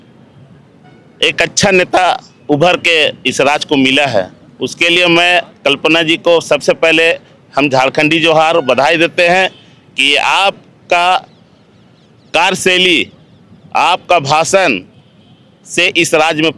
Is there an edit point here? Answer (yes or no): no